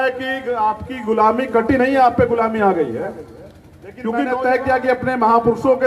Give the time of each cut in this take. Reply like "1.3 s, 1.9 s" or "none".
4.1 s